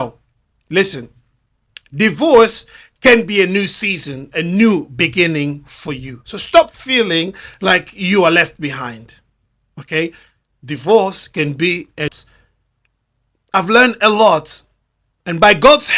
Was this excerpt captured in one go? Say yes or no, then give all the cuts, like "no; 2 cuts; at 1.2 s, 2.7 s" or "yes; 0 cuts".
no; 1 cut; at 12.1 s